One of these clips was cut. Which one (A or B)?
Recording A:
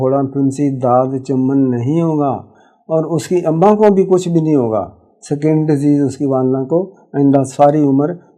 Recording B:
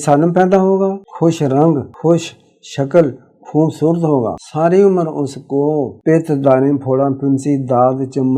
B